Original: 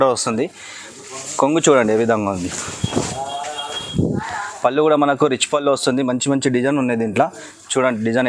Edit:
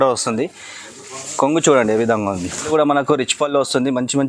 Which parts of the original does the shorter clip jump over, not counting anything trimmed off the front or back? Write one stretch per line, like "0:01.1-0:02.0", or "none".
0:02.7-0:04.8